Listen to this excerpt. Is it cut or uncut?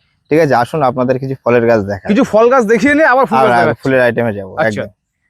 uncut